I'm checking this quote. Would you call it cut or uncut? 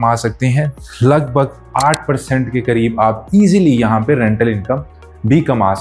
uncut